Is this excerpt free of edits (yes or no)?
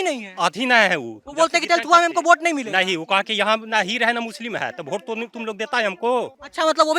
yes